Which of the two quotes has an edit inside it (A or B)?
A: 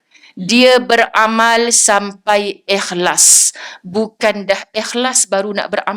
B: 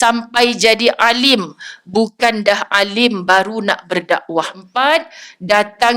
B